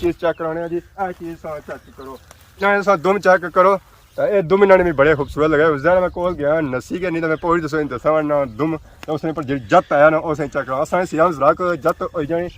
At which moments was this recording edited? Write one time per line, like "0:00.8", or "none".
0:00.9
0:02.5